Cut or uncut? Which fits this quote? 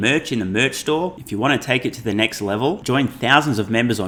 uncut